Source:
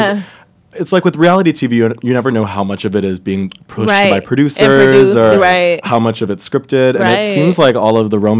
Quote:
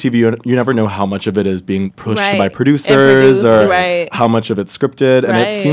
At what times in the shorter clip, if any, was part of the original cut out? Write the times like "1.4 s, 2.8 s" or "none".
2.0 s